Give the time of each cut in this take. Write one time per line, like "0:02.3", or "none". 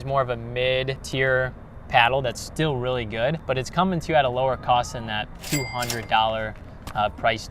0:01.0
0:03.4